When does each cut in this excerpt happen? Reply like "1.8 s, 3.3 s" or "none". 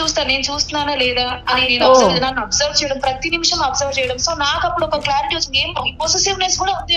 none